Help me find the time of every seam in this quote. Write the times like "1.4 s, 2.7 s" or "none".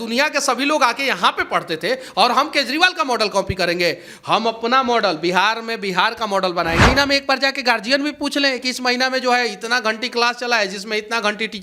6.9 s